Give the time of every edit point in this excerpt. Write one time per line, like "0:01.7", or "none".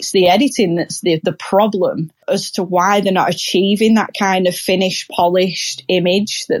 0:02.2